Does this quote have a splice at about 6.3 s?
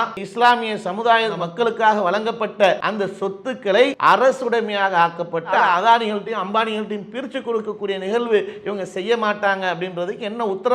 no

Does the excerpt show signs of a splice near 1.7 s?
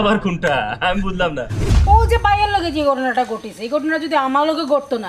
yes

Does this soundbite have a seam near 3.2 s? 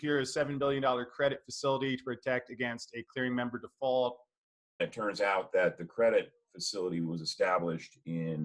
no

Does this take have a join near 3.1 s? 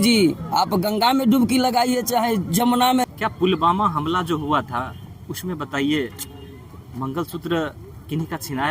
yes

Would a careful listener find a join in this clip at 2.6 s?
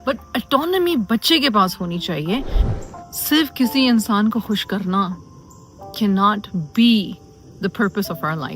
yes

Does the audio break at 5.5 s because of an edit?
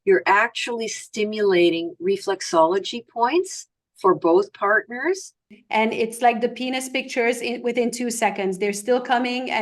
yes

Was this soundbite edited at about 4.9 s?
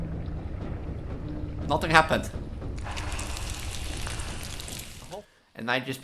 yes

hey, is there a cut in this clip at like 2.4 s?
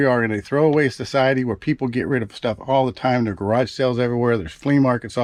no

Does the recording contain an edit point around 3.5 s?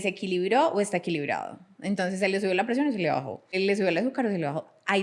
yes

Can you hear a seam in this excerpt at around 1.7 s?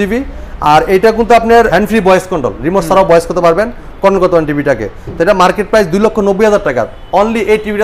yes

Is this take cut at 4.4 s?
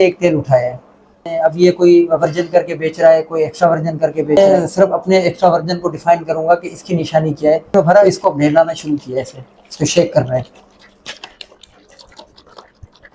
yes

